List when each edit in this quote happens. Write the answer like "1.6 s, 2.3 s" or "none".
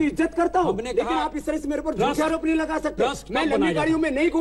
none